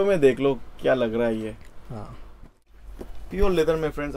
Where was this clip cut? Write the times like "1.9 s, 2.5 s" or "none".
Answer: 2.7 s